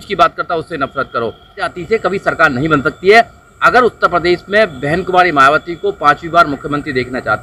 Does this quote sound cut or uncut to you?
cut